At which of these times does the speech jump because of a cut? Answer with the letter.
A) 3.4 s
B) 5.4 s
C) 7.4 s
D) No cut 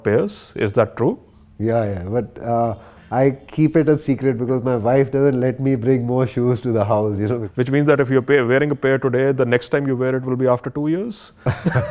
C